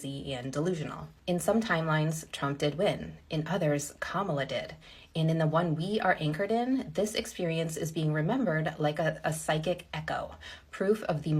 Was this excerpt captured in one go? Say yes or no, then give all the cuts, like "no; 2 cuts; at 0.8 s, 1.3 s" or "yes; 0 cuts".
no; 1 cut; at 1.1 s